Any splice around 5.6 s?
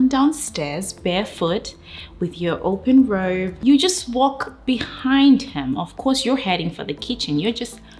no; 1 cut; at 3.5 s

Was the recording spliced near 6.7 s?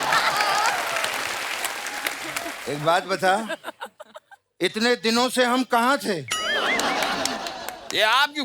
no; 1 cut; at 2.5 s

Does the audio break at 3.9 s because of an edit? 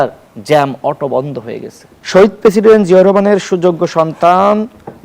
no; 1 cut; at 1.9 s

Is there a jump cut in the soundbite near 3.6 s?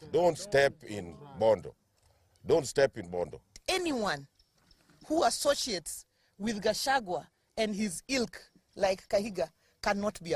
yes; 1 cut; at 3.6 s

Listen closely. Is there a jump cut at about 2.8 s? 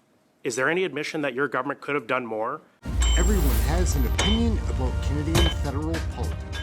yes; 1 cut; at 2.8 s

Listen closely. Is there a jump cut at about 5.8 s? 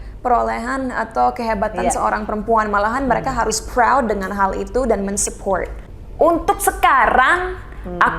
yes; 1 cut; at 5.8 s

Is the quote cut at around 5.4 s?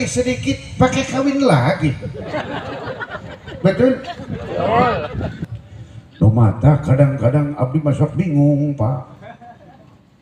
yes; 1 cut; at 5.4 s

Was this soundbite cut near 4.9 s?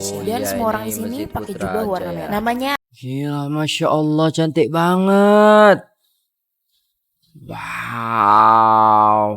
no; 1 cut; at 2.7 s

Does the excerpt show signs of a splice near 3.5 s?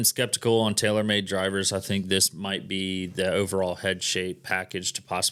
no; 0 cuts

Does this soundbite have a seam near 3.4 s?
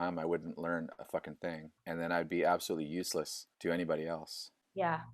yes; 2 cuts; at 1.7 s, 3.4 s

